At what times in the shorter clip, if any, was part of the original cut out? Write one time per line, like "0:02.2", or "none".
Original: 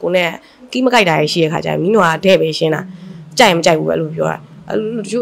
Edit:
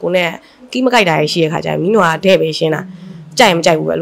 none